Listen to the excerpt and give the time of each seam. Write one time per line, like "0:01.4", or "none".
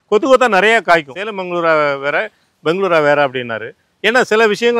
0:01.1